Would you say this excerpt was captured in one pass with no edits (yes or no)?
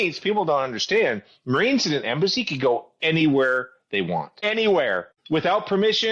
no